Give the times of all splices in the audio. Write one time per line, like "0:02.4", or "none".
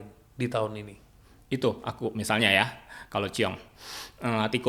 none